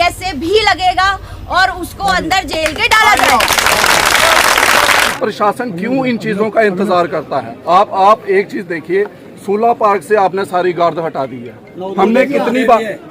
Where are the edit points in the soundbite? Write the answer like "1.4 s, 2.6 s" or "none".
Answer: 5.1 s